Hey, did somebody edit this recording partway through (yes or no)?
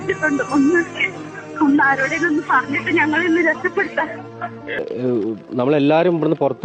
yes